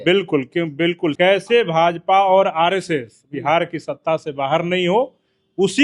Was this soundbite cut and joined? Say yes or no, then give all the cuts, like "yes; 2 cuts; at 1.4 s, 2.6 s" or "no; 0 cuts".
yes; 1 cut; at 1.1 s